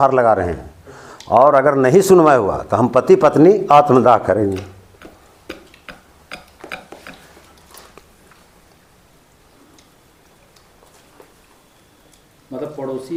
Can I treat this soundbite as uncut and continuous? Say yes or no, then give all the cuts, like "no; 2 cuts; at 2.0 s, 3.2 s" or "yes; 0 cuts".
yes; 0 cuts